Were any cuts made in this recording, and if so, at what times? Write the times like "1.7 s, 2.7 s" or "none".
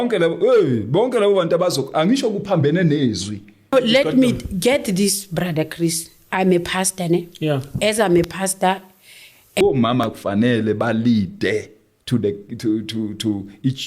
3.7 s, 9.6 s